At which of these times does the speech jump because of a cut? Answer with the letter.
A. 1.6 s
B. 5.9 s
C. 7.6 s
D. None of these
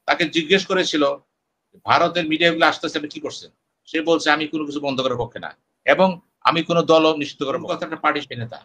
C